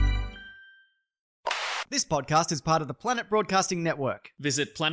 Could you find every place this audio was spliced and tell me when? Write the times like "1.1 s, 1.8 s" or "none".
1.4 s